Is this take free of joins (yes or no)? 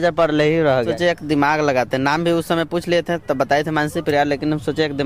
no